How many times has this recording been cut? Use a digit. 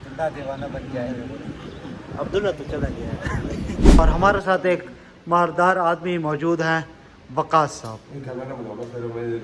1